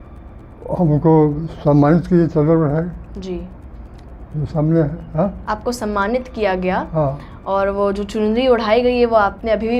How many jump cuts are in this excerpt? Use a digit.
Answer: 0